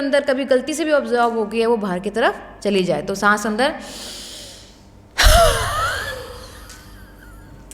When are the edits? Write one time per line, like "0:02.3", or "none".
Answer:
none

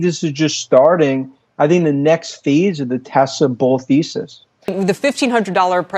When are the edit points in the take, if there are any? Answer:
0:04.7

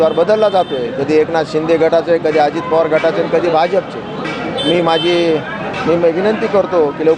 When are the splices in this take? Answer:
none

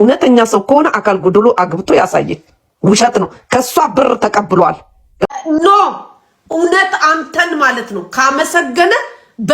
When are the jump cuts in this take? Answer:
0:05.3

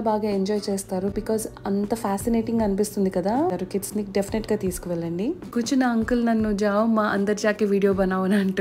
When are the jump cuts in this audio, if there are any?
0:03.6
0:05.5

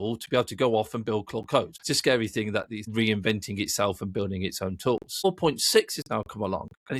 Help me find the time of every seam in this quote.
0:01.8
0:02.8
0:05.2

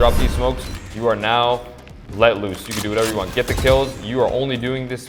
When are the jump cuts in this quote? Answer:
none

